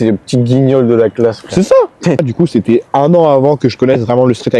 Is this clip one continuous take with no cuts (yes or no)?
no